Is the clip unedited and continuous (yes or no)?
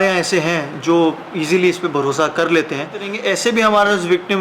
no